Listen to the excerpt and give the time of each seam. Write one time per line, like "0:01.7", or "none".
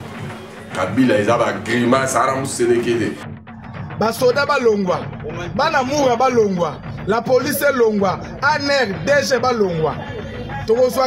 0:03.3